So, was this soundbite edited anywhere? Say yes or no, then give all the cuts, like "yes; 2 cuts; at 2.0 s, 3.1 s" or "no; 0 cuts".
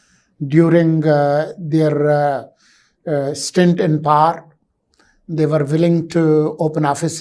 no; 0 cuts